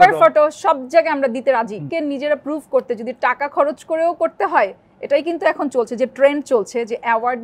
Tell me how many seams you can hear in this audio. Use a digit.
1